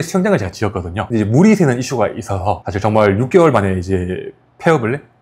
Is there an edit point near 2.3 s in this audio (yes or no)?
no